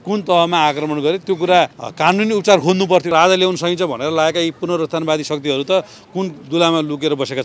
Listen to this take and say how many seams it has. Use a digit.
2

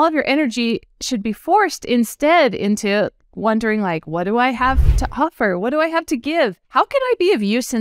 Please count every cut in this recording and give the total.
1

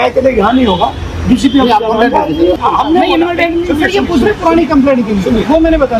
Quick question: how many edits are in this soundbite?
0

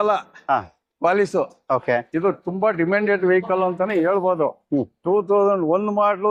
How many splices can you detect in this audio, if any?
0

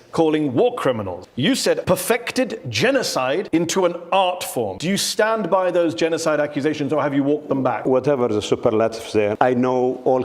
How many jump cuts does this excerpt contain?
5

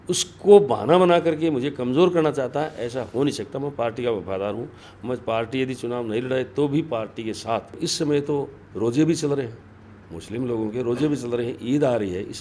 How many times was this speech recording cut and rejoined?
1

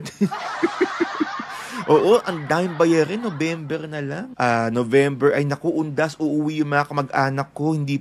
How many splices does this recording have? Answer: 1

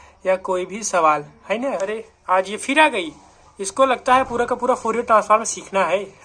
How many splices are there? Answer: 1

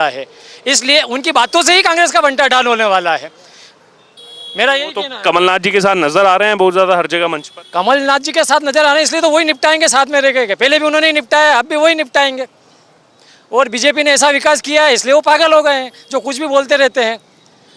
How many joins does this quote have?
0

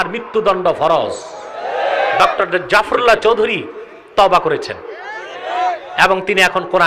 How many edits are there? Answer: 1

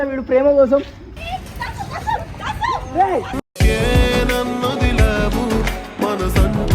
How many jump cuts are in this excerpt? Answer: 1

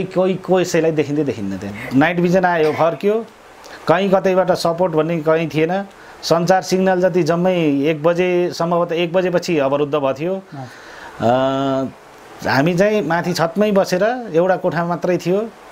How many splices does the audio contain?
1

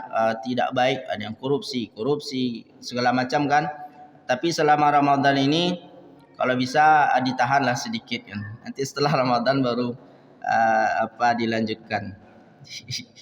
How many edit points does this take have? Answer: 0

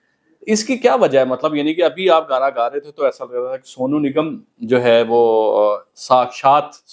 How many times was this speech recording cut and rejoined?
0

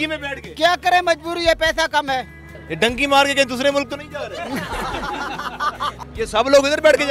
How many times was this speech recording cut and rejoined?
2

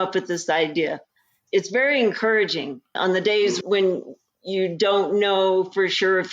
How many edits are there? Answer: 1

